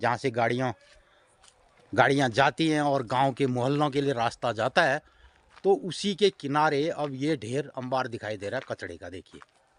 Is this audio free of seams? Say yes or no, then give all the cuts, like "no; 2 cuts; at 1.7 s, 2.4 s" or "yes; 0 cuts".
yes; 0 cuts